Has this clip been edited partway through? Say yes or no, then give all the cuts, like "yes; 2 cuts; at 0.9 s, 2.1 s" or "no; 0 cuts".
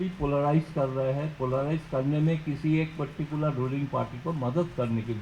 no; 0 cuts